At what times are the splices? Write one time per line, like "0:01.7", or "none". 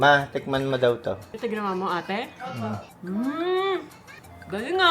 0:01.3
0:02.9